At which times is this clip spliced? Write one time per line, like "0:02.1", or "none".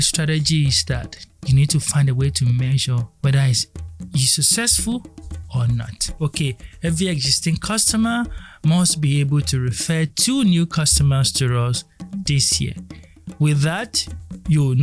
0:03.1
0:06.0